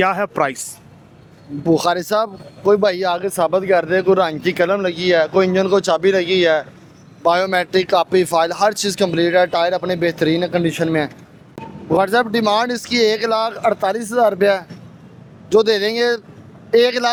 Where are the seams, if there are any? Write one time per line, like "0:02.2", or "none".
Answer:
none